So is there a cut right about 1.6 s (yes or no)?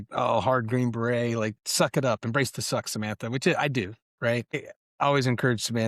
no